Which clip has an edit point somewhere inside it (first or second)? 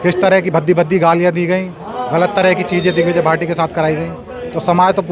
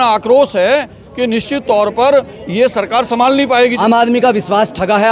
second